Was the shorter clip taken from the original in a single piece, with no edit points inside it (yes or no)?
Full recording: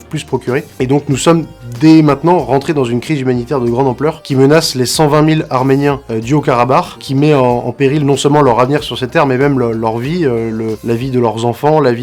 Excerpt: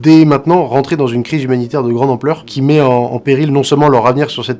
no